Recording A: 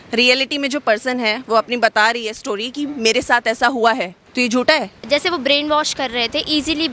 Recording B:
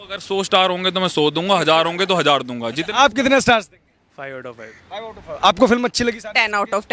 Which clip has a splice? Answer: A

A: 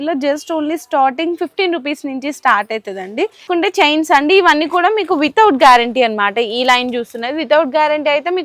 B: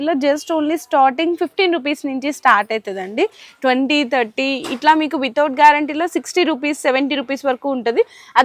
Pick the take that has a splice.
A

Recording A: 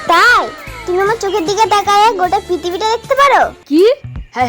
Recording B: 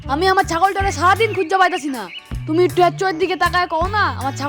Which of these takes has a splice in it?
A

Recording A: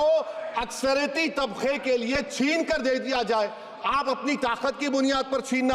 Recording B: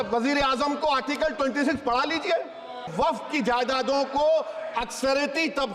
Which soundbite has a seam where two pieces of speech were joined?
B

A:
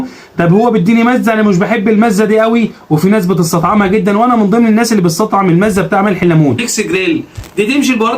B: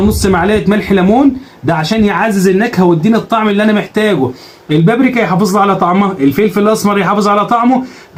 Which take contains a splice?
A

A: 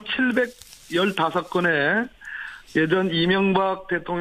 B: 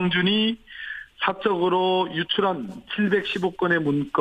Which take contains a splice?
A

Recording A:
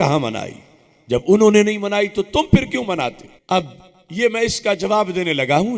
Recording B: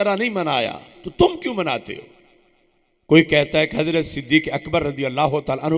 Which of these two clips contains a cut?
A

